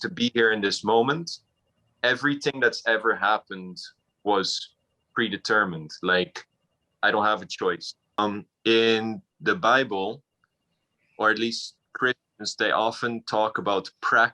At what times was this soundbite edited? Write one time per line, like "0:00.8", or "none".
0:08.2